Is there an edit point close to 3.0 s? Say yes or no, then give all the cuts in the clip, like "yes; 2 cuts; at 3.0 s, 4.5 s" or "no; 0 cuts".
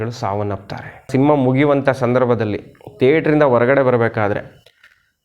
no; 1 cut; at 1.1 s